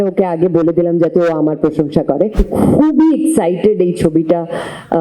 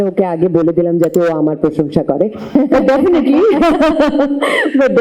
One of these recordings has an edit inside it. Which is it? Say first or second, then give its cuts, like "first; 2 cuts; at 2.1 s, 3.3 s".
first; 1 cut; at 2.4 s